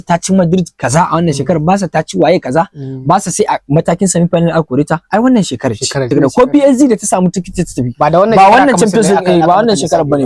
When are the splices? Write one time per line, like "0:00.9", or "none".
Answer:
none